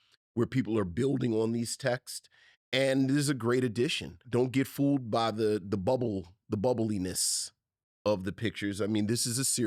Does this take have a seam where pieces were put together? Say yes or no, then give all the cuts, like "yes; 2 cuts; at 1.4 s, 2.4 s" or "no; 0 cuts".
yes; 1 cut; at 4.3 s